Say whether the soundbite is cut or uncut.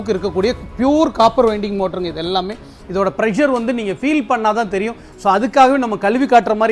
uncut